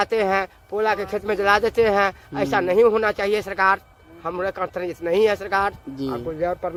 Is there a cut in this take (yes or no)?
no